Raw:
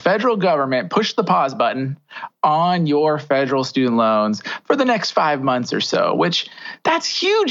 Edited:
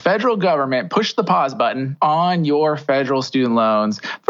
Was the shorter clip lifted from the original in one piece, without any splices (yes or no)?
no